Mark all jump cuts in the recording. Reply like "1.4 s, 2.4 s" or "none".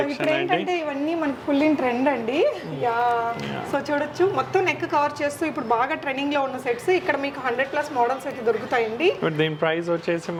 none